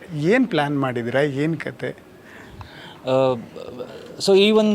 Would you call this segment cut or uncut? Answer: uncut